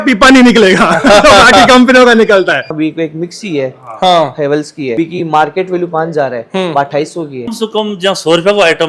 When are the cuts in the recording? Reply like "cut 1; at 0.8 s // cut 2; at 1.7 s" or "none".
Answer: cut 1; at 2.7 s // cut 2; at 4.9 s // cut 3; at 7.4 s